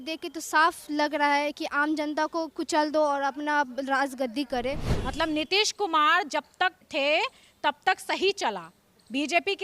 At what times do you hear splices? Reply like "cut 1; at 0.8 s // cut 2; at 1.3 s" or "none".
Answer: cut 1; at 4.9 s // cut 2; at 6.8 s

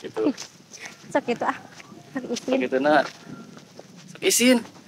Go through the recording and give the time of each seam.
none

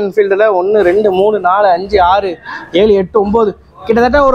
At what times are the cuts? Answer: none

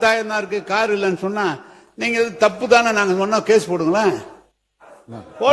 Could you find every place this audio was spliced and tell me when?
none

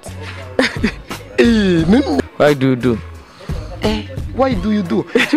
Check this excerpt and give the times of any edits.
cut 1; at 2.3 s

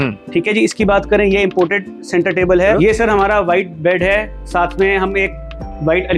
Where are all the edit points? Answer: cut 1; at 2.7 s

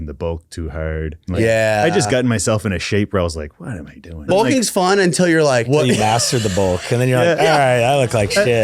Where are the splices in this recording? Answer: cut 1; at 1.2 s // cut 2; at 4.3 s // cut 3; at 5.7 s

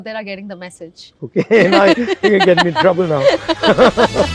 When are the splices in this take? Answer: none

